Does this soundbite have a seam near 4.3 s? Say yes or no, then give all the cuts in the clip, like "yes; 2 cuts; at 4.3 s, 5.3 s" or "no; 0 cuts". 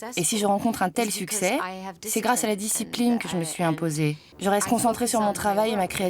yes; 1 cut; at 4.3 s